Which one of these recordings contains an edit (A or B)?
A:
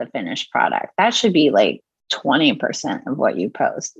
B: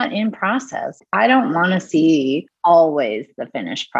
B